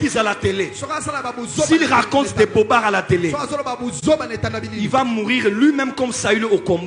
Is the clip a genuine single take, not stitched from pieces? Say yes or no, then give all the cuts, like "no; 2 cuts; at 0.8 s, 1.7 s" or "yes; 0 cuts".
yes; 0 cuts